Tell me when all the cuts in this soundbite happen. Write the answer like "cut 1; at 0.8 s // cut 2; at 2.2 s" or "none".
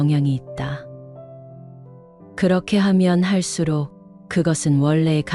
cut 1; at 1.0 s // cut 2; at 2.4 s